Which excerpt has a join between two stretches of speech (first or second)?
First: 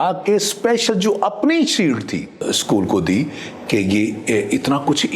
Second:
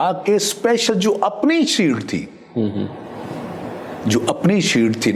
first